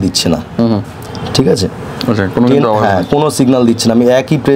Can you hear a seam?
no; 0 cuts

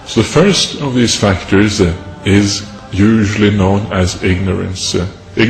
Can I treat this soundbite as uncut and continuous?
yes; 0 cuts

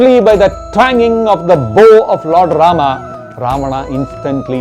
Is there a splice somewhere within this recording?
no; 0 cuts

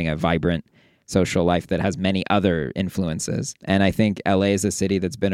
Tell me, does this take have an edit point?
no; 0 cuts

